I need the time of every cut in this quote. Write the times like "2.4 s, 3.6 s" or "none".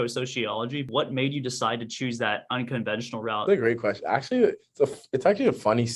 0.9 s, 3.4 s